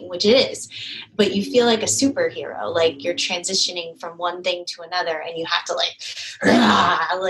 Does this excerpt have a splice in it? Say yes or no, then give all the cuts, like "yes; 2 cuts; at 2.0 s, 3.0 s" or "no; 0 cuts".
no; 0 cuts